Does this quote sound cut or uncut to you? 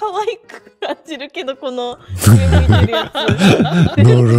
uncut